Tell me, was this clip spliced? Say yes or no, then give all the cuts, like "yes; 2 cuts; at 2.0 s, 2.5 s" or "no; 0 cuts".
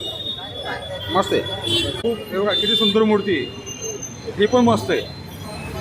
yes; 1 cut; at 2.0 s